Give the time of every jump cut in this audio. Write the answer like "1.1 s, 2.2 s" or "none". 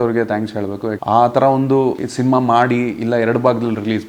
0.9 s, 2.1 s